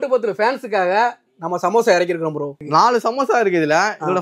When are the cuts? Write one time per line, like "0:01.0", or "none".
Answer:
0:02.6